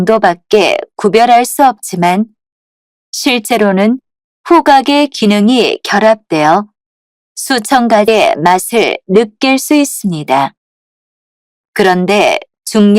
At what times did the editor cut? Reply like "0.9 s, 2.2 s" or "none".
8.1 s